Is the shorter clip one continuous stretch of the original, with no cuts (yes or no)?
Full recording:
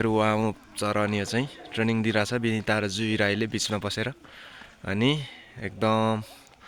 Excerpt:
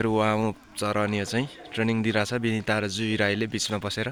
yes